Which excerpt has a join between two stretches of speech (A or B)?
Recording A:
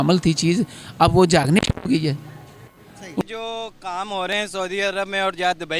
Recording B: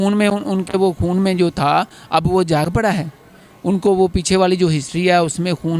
A